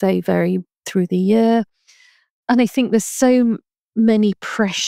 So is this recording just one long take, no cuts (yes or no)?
yes